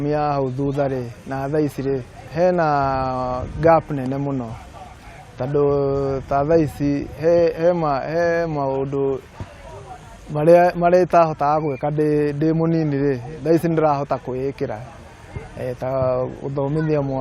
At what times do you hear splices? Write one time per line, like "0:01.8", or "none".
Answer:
0:02.2